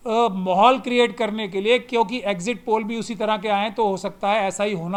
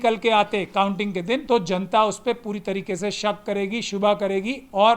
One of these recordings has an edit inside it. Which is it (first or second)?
second